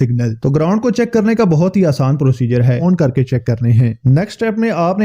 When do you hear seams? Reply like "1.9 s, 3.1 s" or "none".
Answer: 2.8 s